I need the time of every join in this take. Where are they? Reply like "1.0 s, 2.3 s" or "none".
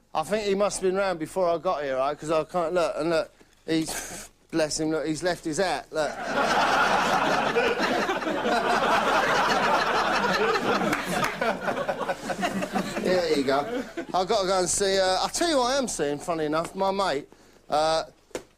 15.9 s